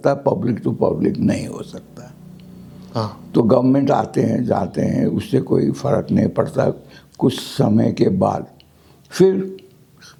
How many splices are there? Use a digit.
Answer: 0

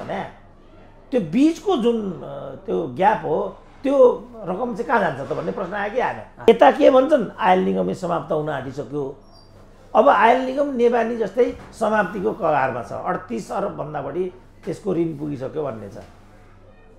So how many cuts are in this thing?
1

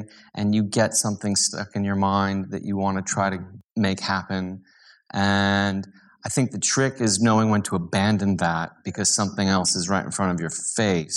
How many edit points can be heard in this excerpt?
1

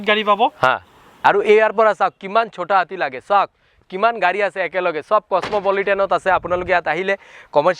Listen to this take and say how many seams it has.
1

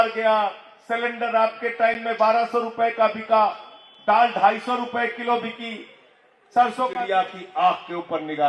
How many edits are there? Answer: 1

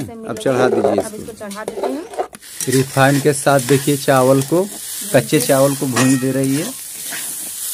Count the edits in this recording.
1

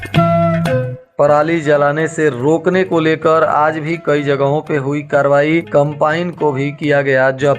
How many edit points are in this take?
1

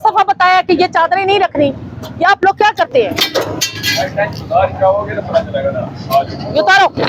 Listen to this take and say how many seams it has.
0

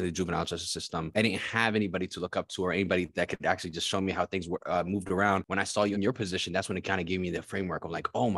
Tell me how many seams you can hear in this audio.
2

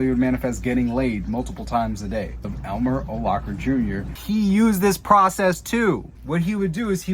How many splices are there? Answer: 3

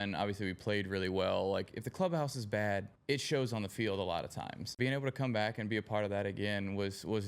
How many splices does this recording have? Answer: 3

